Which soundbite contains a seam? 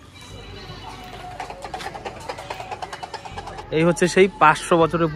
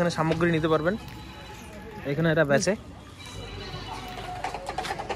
first; 1 cut; at 3.6 s

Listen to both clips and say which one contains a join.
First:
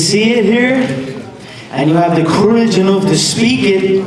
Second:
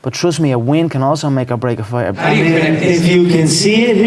second; 1 cut; at 2.1 s

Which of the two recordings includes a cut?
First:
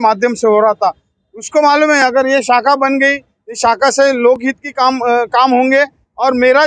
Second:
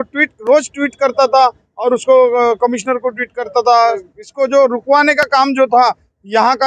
second; 1 cut; at 4.1 s

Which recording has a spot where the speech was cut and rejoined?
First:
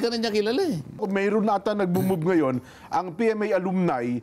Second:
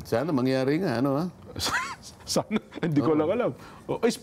first; 1 cut; at 1.0 s

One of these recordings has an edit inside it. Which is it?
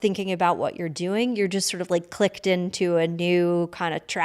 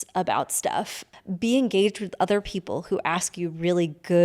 second; 1 cut; at 1.0 s

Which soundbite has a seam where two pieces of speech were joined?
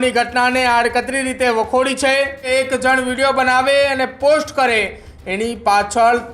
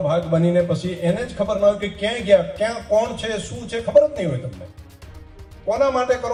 first; 1 cut; at 2.5 s

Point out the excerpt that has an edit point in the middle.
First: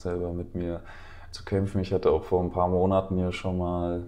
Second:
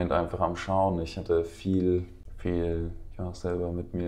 second; 1 cut; at 2.2 s

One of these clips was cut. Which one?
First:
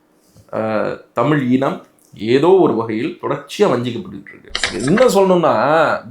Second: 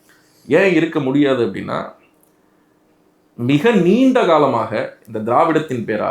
first; 1 cut; at 4.7 s

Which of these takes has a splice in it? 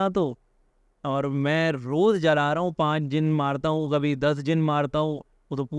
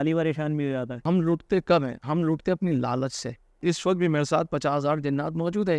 second; 2 cuts; at 1.0 s, 3.6 s

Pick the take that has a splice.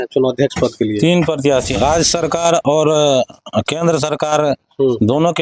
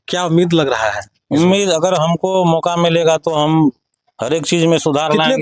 first; 1 cut; at 1.7 s

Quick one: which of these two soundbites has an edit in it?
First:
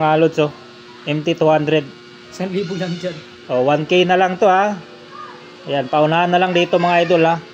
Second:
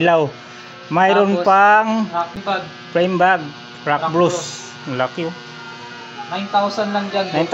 second; 1 cut; at 2.4 s

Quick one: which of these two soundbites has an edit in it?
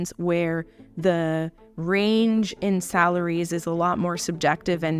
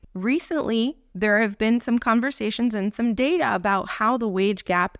second; 1 cut; at 1.0 s

